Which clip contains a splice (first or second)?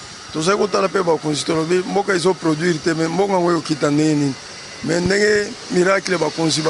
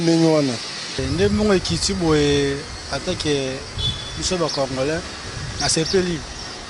second